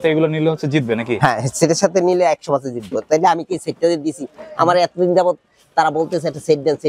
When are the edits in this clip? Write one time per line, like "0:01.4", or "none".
none